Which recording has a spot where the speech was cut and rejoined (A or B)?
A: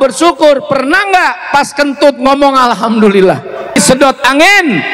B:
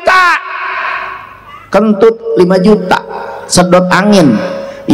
A